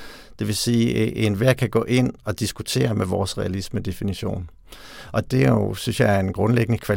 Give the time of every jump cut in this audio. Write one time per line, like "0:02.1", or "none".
0:05.3